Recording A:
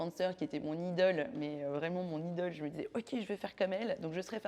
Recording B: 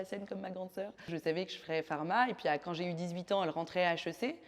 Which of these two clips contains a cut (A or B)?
B